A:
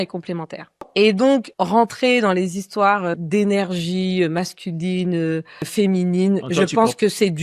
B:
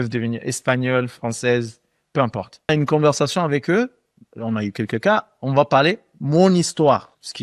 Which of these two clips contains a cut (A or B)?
B